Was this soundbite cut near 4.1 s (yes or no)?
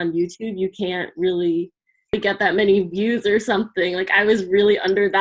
no